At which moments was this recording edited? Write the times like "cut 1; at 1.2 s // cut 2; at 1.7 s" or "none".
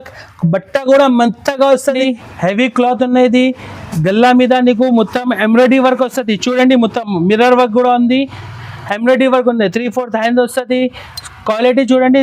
cut 1; at 2.0 s